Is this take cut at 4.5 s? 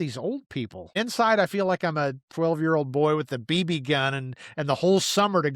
no; 2 cuts; at 0.9 s, 2.3 s

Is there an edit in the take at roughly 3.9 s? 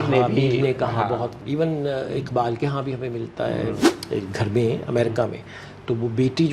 yes; 2 cuts; at 1.4 s, 3.9 s

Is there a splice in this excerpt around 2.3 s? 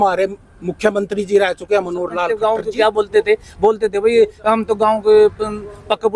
yes; 1 cut; at 2.3 s

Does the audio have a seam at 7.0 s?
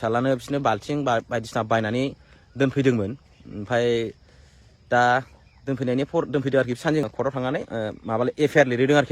yes; 1 cut; at 7.0 s

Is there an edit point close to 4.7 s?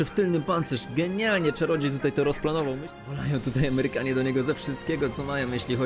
no; 1 cut; at 2.8 s

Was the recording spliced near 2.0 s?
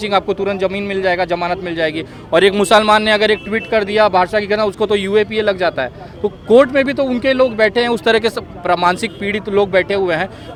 no; 0 cuts

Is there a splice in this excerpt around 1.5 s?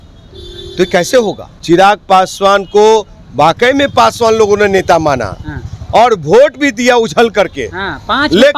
yes; 1 cut; at 1.5 s

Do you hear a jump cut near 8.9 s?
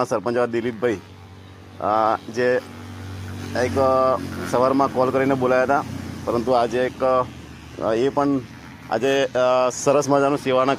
no; 0 cuts

